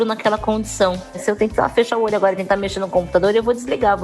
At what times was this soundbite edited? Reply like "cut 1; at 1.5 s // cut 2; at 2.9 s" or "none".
cut 1; at 1.2 s